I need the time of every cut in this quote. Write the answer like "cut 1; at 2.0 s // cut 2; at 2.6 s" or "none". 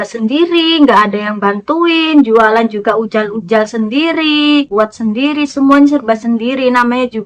cut 1; at 4.7 s